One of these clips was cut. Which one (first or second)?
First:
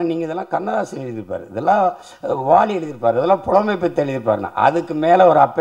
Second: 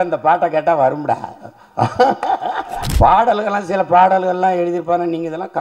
second